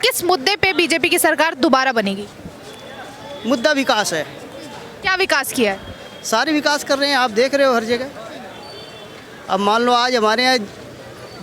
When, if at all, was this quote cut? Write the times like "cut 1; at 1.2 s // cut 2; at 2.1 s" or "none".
none